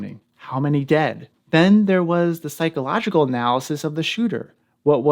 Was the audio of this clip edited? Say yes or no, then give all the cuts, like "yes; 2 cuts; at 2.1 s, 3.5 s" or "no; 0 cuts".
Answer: yes; 1 cut; at 1.3 s